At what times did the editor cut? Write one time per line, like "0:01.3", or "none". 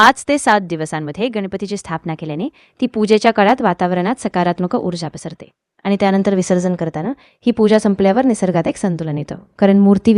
none